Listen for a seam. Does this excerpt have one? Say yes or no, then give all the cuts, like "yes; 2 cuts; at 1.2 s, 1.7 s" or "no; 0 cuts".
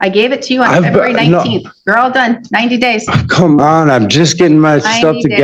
no; 0 cuts